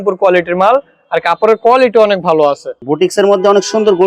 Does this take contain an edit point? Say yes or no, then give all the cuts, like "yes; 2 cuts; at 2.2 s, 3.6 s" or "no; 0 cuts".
yes; 1 cut; at 2.7 s